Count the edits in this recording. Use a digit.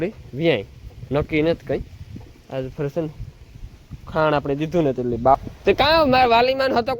1